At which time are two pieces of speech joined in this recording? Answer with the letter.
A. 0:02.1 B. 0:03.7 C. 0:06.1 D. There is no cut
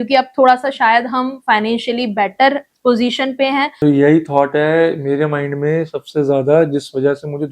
B